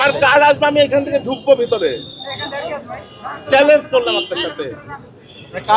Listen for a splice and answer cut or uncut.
uncut